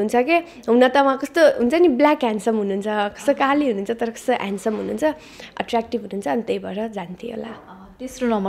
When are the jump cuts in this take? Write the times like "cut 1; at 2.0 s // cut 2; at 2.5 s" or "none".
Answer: none